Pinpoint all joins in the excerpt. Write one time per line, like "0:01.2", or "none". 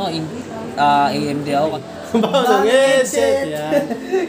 0:01.8

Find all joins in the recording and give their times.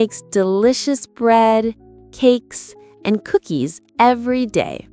none

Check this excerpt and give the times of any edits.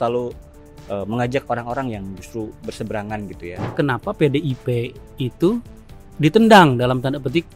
0:03.7

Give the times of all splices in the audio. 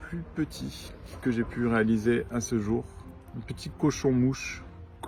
none

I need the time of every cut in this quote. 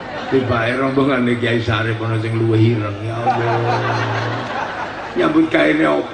none

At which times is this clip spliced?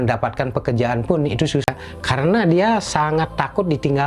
0:01.6

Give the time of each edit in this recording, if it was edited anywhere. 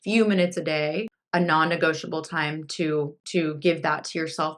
0:01.2
0:03.2

